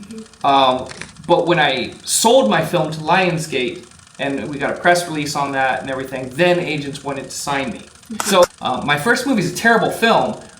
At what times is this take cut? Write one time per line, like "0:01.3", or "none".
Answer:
0:08.4